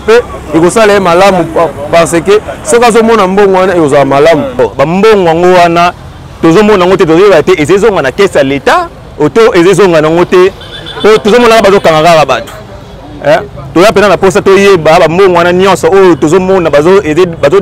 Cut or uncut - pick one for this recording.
cut